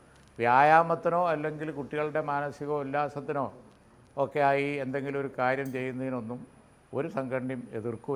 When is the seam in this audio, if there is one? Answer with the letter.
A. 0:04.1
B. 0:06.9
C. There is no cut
C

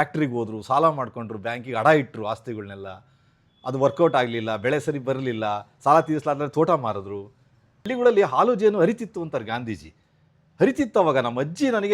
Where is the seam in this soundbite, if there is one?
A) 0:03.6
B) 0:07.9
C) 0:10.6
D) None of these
B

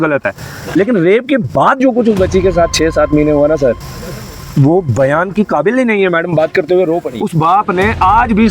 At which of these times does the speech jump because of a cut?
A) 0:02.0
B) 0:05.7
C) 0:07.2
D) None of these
C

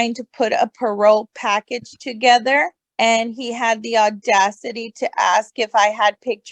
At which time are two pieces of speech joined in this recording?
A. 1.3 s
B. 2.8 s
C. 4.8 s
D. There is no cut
B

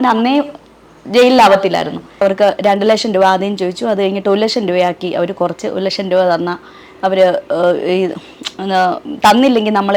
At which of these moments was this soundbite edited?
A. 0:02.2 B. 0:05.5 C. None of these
A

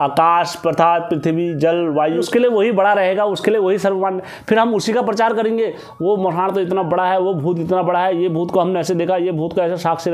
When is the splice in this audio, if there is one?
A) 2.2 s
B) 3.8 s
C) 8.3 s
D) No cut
A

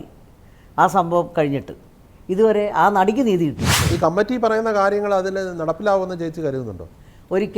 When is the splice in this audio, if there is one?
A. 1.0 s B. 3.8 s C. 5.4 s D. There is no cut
B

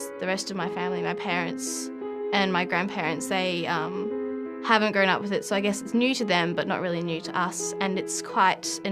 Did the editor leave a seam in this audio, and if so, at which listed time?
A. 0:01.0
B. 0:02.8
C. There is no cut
A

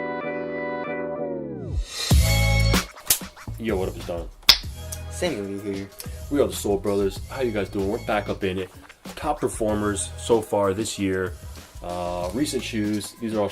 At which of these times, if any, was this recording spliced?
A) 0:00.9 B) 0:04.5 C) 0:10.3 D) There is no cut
A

